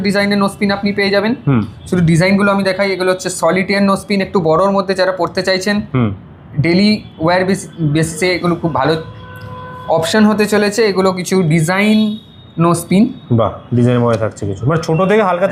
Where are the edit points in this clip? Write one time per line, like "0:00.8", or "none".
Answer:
none